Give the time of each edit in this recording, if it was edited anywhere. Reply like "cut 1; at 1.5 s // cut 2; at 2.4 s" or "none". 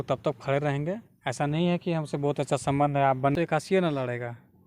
cut 1; at 3.3 s